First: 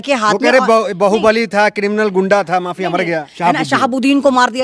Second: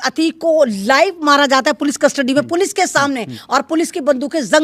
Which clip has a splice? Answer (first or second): first